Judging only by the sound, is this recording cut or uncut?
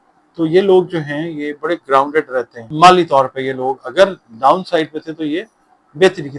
cut